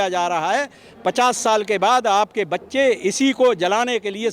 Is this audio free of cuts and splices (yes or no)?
yes